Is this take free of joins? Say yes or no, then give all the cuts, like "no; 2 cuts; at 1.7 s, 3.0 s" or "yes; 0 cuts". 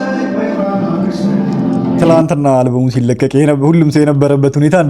yes; 0 cuts